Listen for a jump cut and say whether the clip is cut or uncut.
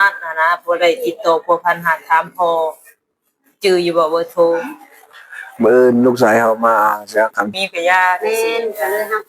cut